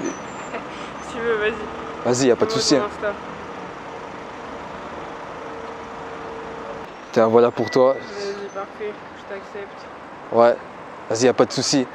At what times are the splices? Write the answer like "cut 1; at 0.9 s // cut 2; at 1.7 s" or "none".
none